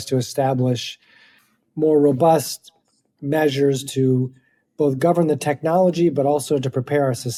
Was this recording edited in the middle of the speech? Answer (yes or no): no